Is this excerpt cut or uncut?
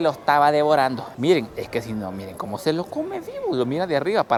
uncut